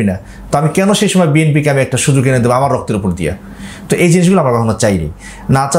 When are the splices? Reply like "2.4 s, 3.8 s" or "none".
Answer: none